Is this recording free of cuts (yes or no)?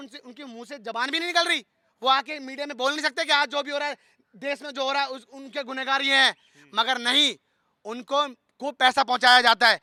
yes